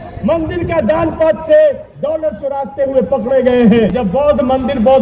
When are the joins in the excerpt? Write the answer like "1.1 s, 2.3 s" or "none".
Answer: 4.0 s